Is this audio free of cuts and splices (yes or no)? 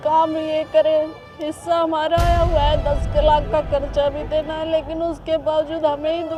yes